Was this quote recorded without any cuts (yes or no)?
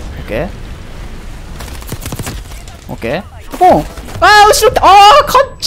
no